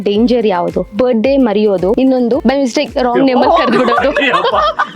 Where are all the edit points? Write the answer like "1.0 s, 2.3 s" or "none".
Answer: 0.8 s, 2.2 s